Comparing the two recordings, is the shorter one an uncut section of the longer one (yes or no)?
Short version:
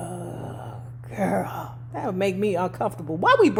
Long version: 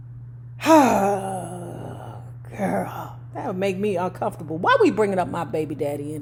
yes